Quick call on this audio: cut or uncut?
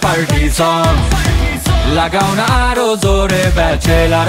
uncut